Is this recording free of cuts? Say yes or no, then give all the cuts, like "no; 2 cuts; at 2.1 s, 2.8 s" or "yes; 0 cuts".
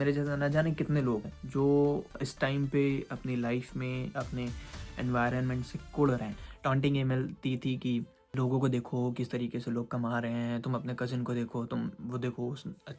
no; 5 cuts; at 1.4 s, 2.2 s, 4.1 s, 6.4 s, 8.2 s